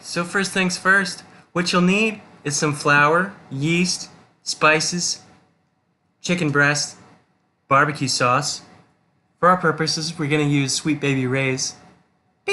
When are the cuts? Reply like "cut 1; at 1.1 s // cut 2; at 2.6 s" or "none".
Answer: none